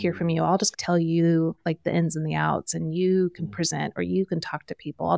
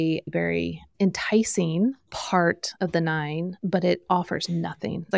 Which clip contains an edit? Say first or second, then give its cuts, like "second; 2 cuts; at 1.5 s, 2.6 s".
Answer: second; 2 cuts; at 2.7 s, 3.5 s